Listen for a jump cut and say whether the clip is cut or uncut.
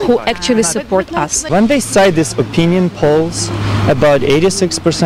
cut